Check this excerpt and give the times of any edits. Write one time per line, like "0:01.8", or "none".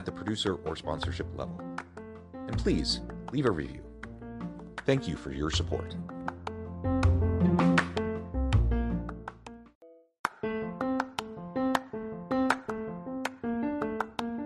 0:09.6